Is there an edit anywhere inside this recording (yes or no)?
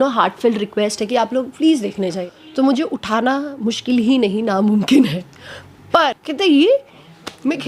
yes